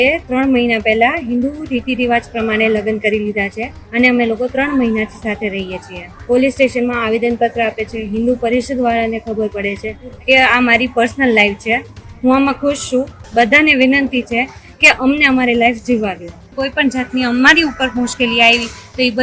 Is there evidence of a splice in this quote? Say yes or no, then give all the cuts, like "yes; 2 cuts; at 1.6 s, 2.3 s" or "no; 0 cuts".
yes; 5 cuts; at 3.7 s, 6.1 s, 10.2 s, 13.2 s, 16.5 s